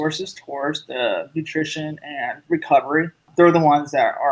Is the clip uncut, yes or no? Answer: no